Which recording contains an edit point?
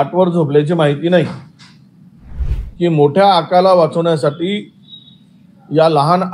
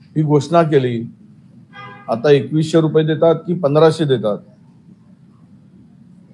first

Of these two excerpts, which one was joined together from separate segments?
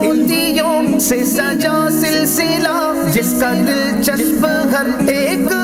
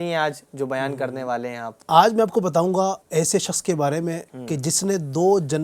second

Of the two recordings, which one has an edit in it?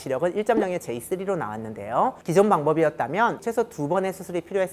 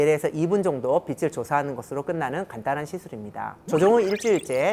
first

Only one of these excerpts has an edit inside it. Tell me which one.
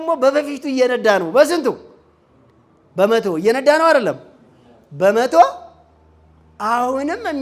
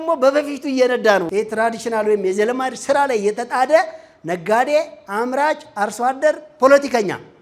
second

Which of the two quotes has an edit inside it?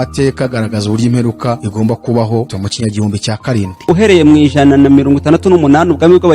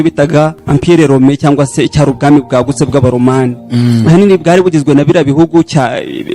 first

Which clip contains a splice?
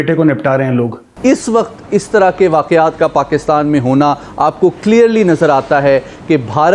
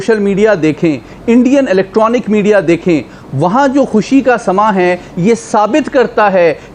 first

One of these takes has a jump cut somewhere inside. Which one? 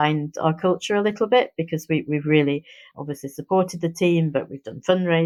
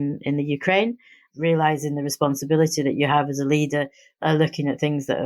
second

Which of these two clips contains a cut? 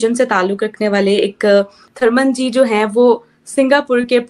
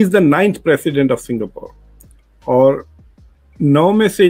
first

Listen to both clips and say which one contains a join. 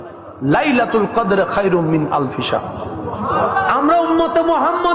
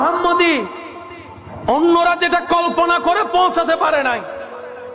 first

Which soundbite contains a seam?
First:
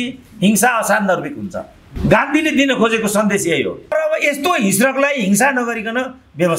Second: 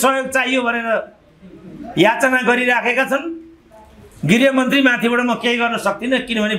first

